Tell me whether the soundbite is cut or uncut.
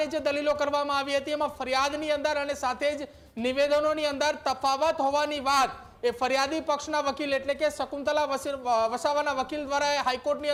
uncut